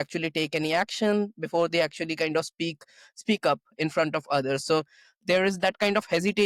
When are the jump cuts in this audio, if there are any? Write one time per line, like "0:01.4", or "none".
none